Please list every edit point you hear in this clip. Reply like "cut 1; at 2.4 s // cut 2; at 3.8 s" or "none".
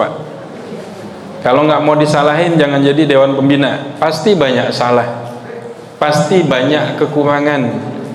none